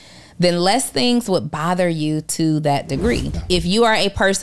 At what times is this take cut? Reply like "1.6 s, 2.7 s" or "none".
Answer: 3.4 s